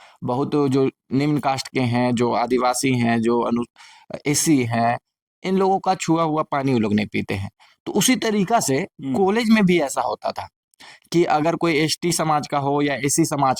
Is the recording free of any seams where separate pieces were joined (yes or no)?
yes